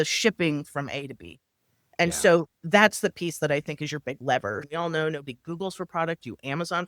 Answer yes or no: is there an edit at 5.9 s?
no